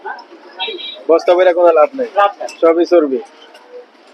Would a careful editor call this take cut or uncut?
uncut